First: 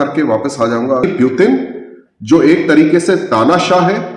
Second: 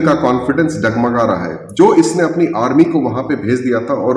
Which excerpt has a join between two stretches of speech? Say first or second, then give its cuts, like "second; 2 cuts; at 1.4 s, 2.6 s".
first; 1 cut; at 1.0 s